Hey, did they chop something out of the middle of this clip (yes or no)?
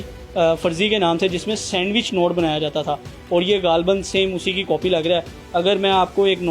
no